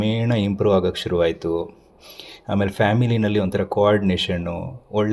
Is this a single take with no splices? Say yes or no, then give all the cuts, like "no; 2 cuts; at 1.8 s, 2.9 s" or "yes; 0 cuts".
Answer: yes; 0 cuts